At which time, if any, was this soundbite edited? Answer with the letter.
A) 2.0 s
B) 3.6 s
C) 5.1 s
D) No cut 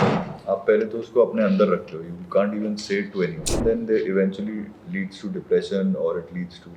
B